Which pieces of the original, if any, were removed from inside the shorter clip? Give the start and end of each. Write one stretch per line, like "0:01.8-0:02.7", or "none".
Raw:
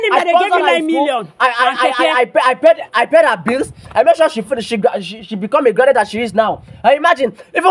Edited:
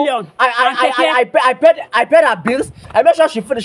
none